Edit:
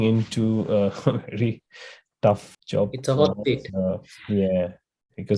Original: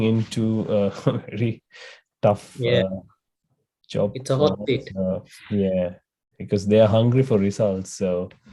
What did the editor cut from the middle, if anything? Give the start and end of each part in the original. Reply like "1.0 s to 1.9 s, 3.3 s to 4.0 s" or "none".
2.5 s to 3.7 s